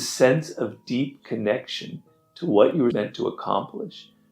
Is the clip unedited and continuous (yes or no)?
no